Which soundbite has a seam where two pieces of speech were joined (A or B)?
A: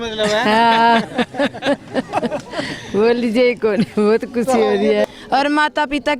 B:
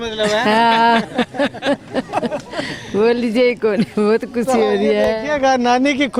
A